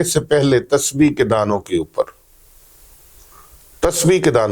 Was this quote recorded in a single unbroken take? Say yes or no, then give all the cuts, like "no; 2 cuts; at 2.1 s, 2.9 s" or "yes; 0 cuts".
yes; 0 cuts